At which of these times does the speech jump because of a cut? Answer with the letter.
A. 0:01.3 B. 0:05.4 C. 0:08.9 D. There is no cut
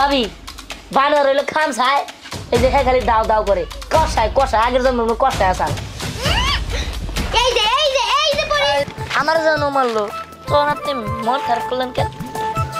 C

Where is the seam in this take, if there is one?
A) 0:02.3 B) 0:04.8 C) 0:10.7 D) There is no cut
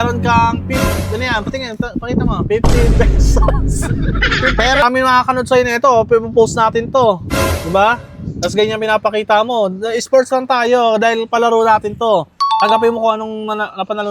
B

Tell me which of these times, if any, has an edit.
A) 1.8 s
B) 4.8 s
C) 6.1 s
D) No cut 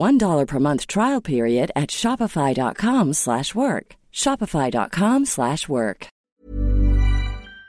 C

